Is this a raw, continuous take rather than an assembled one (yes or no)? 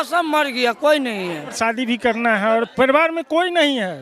no